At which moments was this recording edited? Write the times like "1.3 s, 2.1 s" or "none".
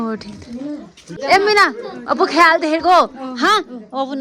1.1 s